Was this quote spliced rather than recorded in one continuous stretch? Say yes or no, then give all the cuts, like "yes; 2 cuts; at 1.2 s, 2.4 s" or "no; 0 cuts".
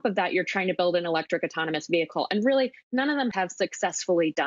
yes; 1 cut; at 3.3 s